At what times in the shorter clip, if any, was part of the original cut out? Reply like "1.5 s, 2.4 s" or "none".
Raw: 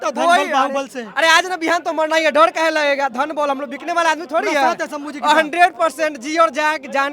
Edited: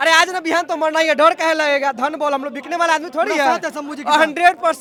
none